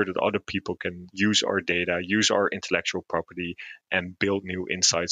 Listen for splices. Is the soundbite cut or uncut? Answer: cut